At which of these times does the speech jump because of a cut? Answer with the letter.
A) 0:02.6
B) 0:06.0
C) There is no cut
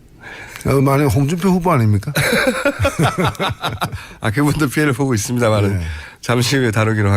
B